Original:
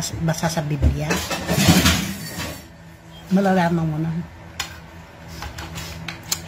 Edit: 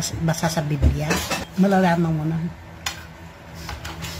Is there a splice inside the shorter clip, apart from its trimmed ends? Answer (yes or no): yes